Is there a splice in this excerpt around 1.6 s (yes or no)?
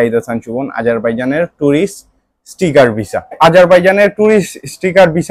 no